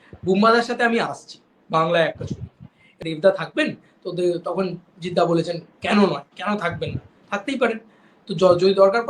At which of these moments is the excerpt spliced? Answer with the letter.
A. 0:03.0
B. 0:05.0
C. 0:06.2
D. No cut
A